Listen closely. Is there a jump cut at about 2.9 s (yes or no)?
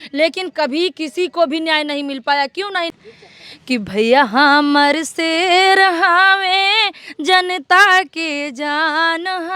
yes